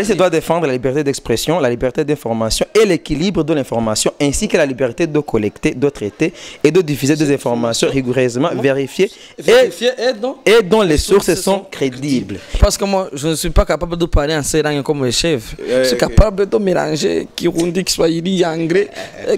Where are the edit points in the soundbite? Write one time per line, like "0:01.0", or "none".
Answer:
0:12.6